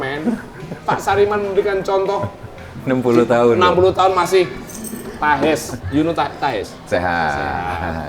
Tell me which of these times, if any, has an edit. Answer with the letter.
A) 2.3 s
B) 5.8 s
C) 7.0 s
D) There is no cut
B